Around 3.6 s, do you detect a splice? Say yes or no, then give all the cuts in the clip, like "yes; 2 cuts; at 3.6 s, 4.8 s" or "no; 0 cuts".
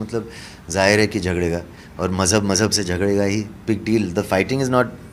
yes; 1 cut; at 3.6 s